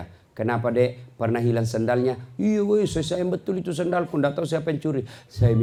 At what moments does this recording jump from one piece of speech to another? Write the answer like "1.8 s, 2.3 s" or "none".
none

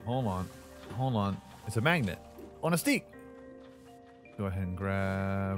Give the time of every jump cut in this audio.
1.5 s

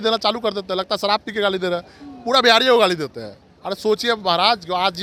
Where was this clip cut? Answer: none

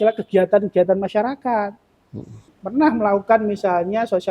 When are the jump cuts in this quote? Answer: 2.5 s

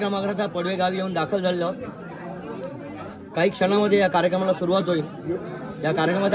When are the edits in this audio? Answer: none

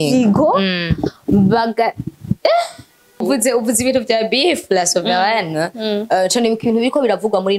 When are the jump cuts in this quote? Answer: 3.2 s

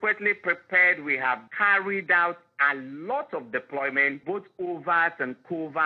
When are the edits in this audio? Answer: 1.5 s, 4.2 s

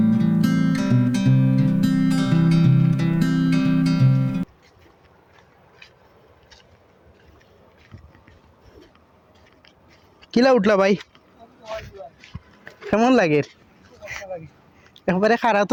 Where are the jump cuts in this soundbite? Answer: none

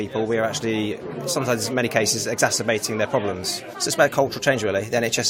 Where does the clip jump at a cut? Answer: 3.5 s

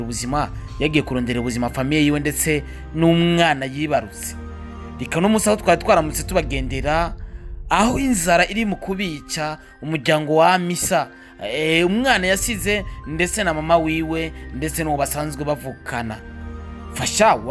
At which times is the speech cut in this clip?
none

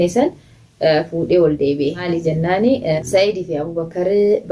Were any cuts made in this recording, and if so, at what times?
2.0 s, 3.0 s

